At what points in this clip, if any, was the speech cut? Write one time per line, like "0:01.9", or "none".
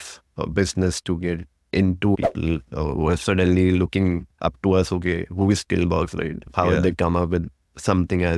0:02.2
0:06.4